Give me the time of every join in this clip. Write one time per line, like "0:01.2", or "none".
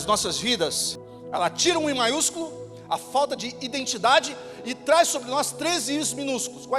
0:00.9